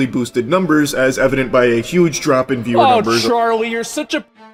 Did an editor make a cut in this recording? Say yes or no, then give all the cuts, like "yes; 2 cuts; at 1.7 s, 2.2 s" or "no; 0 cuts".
no; 0 cuts